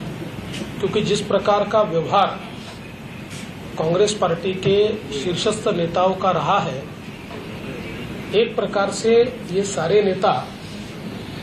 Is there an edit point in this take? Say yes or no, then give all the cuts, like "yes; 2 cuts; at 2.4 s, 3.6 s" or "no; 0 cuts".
no; 0 cuts